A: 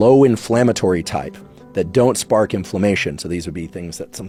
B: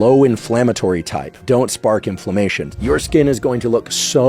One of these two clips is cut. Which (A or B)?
B